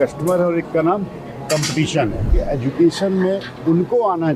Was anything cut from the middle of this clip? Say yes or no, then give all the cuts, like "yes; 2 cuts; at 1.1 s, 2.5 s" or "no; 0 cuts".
yes; 1 cut; at 2.4 s